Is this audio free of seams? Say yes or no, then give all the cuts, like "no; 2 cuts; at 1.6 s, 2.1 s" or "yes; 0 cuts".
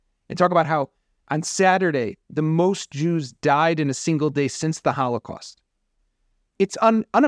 yes; 0 cuts